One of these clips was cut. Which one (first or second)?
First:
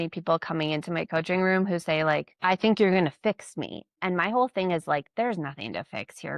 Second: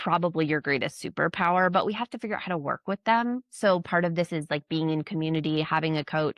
first